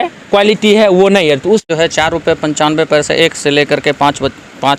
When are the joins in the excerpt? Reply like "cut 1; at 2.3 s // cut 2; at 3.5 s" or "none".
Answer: cut 1; at 1.7 s

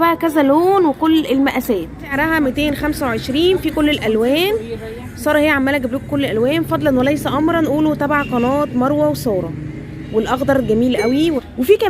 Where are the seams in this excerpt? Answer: cut 1; at 2.0 s // cut 2; at 11.2 s

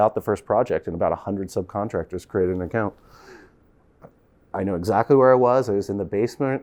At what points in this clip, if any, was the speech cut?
none

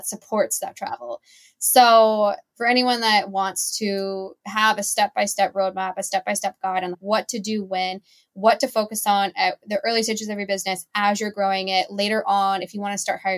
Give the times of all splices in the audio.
cut 1; at 2.5 s

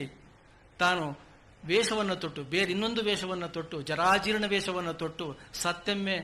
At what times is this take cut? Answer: none

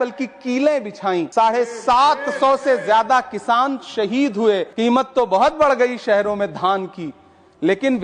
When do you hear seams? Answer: cut 1; at 1.3 s // cut 2; at 4.7 s

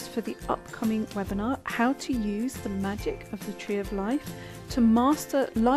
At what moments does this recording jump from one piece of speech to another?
none

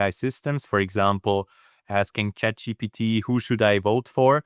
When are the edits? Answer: none

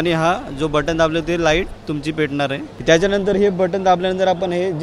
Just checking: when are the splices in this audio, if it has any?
cut 1; at 2.7 s

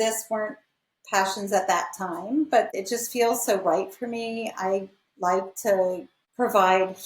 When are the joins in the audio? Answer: cut 1; at 2.7 s

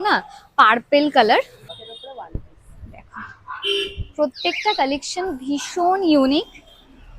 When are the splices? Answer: cut 1; at 1.6 s

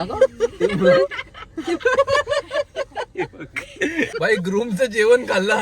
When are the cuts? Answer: cut 1; at 4.1 s

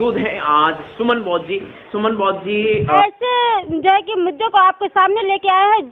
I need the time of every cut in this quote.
cut 1; at 3.0 s

